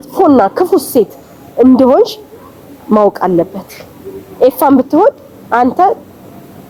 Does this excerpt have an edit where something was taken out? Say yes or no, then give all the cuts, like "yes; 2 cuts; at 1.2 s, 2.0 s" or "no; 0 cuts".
no; 0 cuts